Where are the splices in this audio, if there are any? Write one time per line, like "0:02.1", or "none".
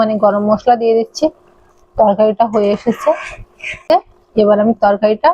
0:03.8